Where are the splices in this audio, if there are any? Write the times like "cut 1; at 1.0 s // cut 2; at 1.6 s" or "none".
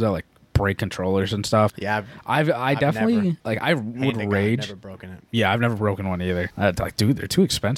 cut 1; at 1.8 s // cut 2; at 3.4 s // cut 3; at 6.5 s

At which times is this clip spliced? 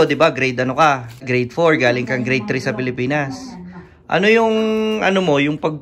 none

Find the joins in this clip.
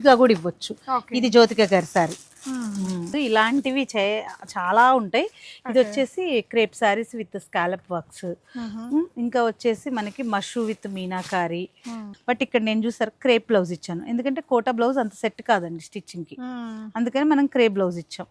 cut 1; at 3.1 s // cut 2; at 12.1 s

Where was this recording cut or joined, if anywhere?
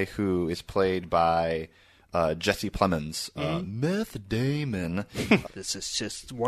cut 1; at 5.4 s

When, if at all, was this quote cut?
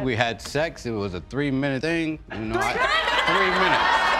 cut 1; at 1.8 s

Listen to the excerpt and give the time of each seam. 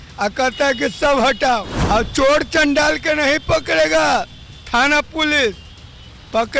cut 1; at 1.7 s

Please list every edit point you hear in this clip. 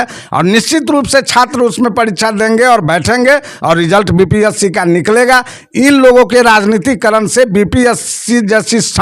none

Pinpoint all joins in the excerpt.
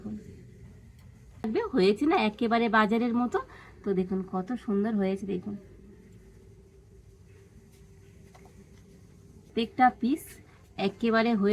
cut 1; at 1.5 s // cut 2; at 9.5 s

